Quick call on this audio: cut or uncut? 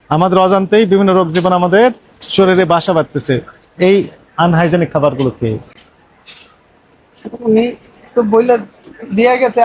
uncut